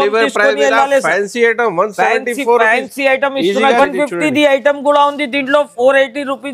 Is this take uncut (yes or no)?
no